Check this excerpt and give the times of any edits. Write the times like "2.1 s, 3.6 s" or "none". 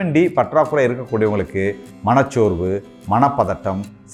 none